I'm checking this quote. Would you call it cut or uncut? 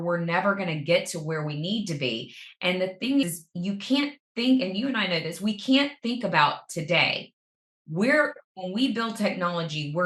uncut